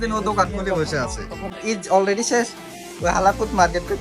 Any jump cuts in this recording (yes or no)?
yes